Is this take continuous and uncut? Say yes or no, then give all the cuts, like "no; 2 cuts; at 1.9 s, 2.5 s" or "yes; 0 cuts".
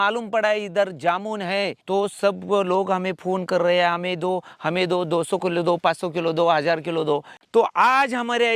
no; 1 cut; at 7.4 s